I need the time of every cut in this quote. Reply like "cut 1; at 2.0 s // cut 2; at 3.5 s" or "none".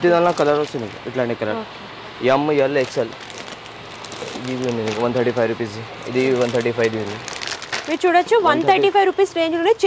none

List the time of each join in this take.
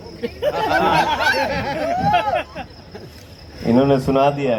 none

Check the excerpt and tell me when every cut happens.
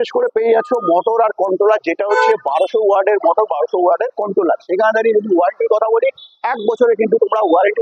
none

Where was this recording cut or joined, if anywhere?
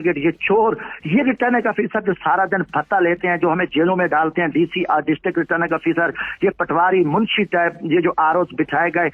none

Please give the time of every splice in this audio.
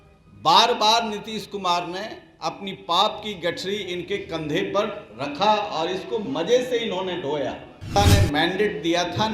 cut 1; at 8.0 s

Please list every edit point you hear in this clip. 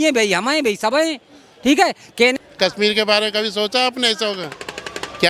cut 1; at 2.4 s

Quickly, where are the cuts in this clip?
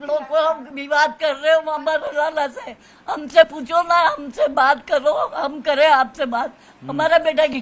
none

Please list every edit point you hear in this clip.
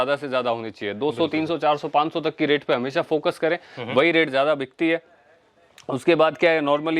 none

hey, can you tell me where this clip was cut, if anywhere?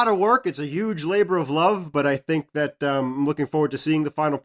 cut 1; at 1.9 s

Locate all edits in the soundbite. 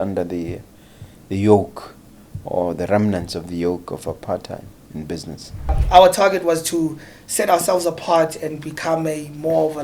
cut 1; at 5.8 s

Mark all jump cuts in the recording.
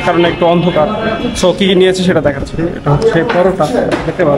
none

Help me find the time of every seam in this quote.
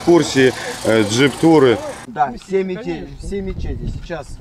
cut 1; at 2.0 s

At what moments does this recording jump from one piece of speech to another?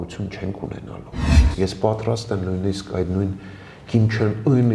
cut 1; at 1.3 s

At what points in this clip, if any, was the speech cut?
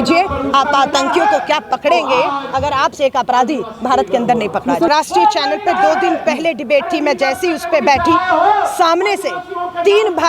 cut 1; at 4.9 s

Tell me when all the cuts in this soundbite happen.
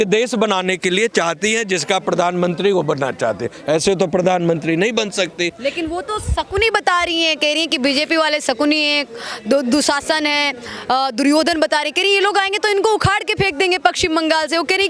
none

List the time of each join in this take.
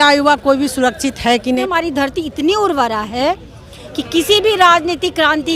cut 1; at 1.7 s

